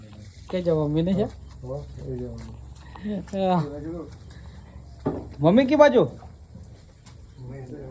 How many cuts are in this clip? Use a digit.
0